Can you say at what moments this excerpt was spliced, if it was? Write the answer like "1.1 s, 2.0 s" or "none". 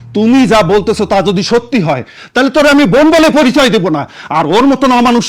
none